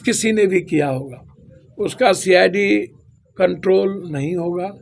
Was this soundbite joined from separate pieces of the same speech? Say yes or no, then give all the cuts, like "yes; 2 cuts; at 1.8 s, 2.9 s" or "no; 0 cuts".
no; 0 cuts